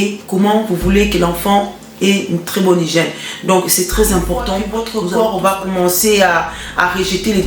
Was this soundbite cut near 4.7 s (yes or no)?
yes